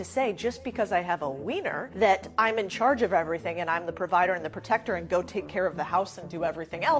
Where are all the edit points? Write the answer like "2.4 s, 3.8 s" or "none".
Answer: none